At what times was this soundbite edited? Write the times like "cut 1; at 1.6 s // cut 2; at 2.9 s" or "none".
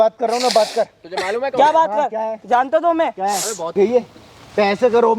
cut 1; at 3.7 s

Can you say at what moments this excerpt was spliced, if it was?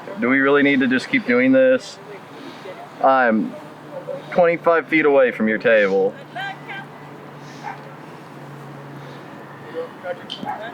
none

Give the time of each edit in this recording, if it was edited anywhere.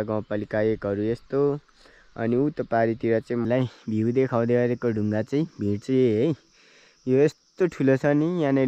cut 1; at 3.4 s

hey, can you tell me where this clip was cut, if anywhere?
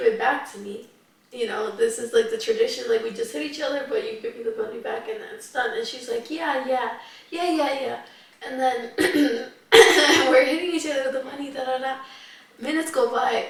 none

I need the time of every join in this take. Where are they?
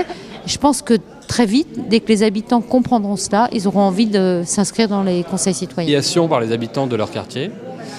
none

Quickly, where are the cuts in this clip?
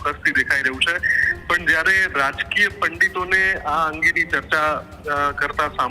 none

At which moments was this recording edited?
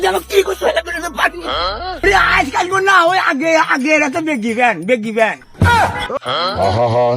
cut 1; at 1.9 s // cut 2; at 6.1 s

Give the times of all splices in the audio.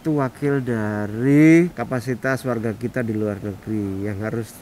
cut 1; at 1.8 s

